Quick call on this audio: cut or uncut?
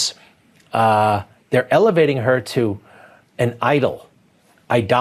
uncut